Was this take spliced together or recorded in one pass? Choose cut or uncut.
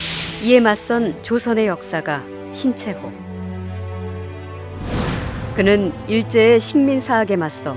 uncut